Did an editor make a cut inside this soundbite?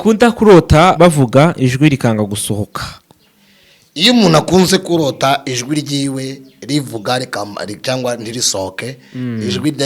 yes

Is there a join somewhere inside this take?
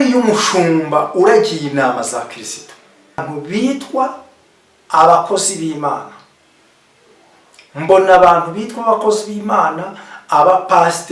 yes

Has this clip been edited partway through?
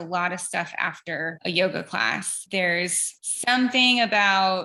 no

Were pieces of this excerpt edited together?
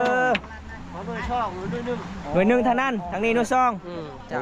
no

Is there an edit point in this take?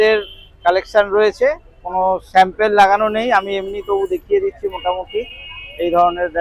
no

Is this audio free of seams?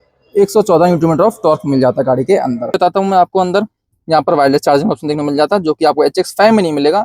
no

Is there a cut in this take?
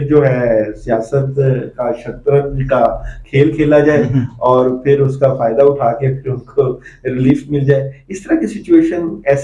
no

